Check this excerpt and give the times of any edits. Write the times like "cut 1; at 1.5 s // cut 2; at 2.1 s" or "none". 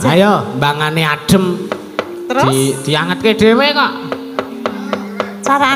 none

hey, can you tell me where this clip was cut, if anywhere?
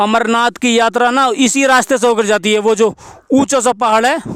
none

